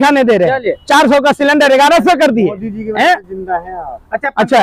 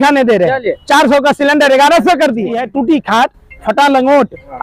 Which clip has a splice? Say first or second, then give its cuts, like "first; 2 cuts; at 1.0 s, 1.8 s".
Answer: second; 1 cut; at 2.6 s